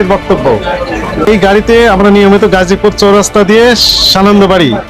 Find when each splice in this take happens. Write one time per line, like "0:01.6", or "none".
0:01.3